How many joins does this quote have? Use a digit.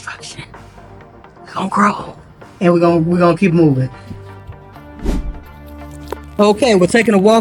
0